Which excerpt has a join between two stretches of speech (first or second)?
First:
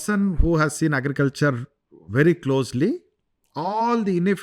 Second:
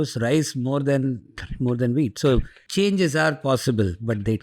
second